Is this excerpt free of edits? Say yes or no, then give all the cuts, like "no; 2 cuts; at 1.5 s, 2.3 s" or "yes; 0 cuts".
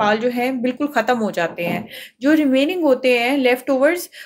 yes; 0 cuts